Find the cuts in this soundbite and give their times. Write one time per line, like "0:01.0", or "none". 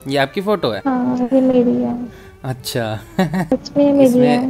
0:00.8
0:03.5